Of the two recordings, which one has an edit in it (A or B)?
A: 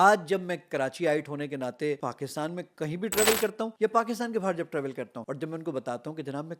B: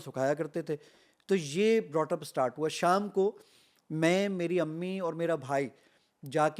A